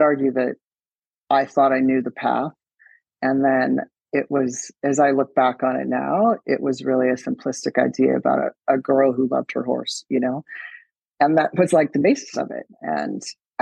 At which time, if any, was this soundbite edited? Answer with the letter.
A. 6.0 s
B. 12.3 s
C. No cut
C